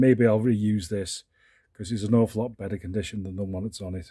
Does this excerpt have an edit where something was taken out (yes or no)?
yes